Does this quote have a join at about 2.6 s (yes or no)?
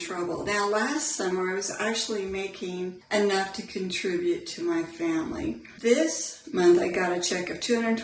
no